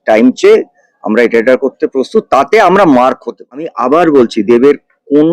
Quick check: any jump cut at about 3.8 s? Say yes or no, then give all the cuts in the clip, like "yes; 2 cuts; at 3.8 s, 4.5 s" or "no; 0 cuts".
yes; 1 cut; at 3.8 s